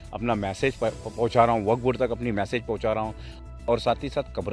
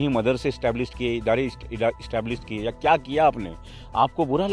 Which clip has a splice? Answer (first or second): first